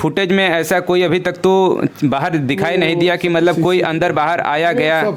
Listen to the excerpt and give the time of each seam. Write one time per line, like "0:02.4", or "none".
none